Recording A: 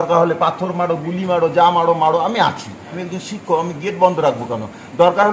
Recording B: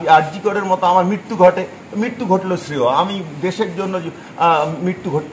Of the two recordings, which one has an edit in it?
A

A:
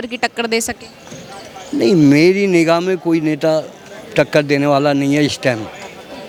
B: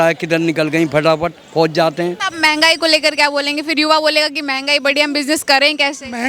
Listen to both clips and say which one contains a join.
B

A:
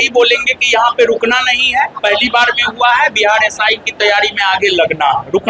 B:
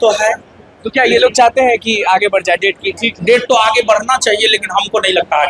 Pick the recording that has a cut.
B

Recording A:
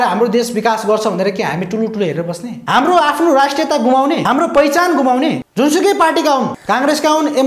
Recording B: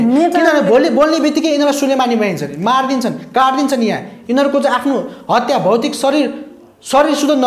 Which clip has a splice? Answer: A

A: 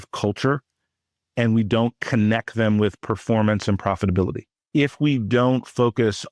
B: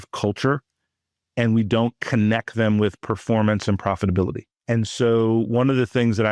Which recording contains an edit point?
A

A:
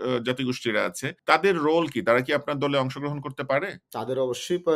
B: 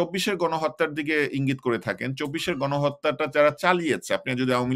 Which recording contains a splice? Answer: A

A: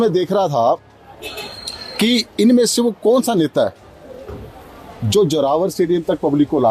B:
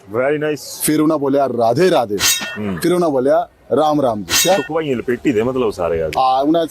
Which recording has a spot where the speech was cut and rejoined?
B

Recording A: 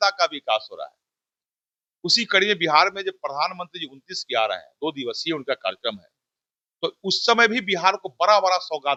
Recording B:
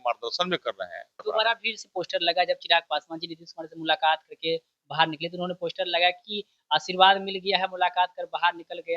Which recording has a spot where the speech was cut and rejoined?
B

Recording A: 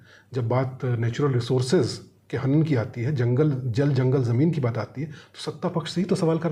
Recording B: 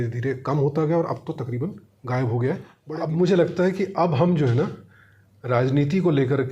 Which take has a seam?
B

